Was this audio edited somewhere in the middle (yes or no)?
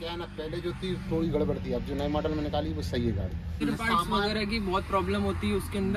yes